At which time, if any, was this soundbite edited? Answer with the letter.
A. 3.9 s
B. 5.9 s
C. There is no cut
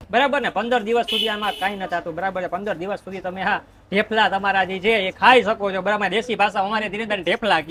C